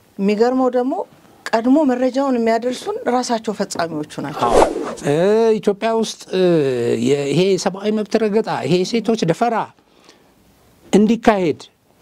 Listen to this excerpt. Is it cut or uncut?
cut